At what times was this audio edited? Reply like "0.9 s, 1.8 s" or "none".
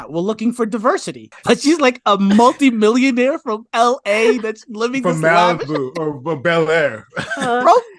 1.3 s